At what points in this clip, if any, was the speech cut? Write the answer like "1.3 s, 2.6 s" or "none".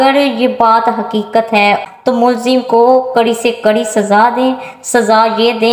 1.8 s